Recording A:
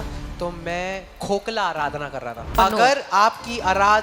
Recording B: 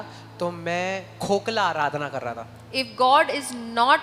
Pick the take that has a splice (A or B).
A